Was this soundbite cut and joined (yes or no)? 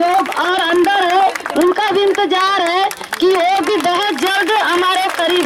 no